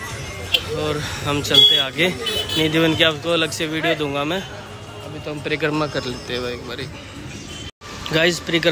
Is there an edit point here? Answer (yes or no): no